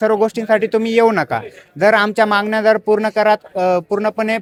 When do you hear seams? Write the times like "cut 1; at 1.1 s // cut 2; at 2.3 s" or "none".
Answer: none